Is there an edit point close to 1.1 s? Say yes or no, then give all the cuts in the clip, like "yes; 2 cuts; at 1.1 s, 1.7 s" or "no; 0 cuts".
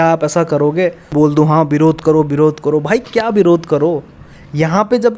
yes; 1 cut; at 1.1 s